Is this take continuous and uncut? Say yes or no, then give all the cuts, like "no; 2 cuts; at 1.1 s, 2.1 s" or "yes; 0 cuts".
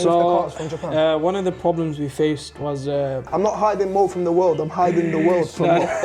no; 1 cut; at 3.2 s